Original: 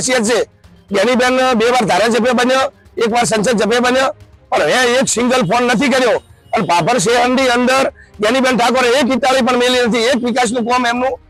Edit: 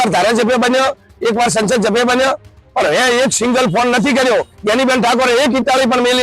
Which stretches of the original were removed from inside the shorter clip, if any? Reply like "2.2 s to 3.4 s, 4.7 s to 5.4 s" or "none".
6.3 s to 8.1 s